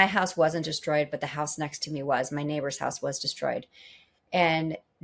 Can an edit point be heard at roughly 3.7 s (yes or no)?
no